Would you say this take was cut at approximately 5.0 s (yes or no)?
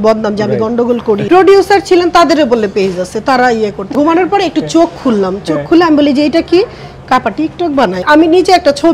no